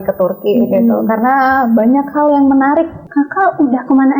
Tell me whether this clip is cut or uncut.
cut